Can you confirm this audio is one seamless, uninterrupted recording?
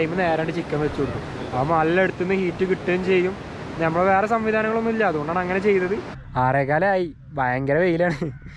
no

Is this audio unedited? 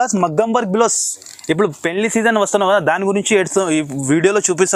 yes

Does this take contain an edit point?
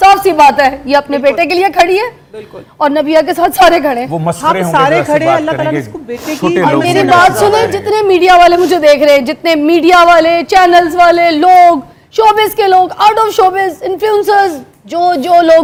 no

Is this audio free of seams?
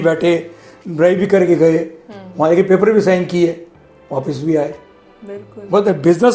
yes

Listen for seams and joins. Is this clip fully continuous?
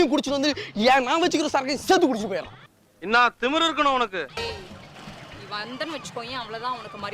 no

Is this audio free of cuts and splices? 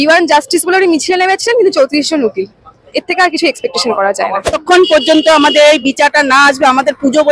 no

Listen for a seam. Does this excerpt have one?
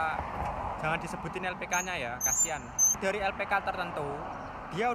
yes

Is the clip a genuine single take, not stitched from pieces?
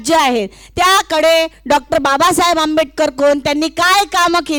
yes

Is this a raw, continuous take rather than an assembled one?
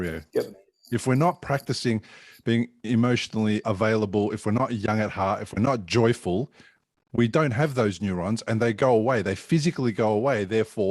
no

